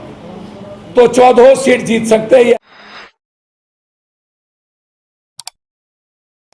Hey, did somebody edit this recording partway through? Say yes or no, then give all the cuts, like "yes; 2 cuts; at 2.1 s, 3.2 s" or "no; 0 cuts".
no; 0 cuts